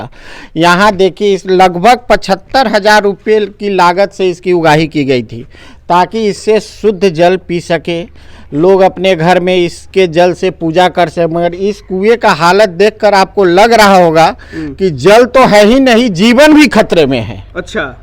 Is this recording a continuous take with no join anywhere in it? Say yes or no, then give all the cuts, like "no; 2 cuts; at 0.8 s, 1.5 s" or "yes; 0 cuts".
yes; 0 cuts